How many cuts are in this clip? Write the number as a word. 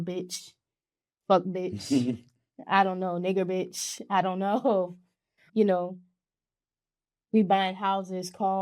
one